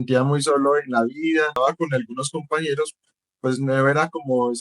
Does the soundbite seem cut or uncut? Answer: cut